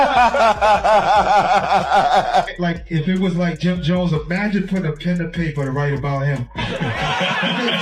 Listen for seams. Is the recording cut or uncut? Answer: cut